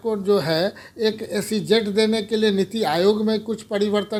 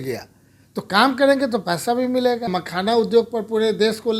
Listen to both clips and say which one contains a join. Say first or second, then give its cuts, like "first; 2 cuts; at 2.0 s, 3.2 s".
second; 1 cut; at 2.5 s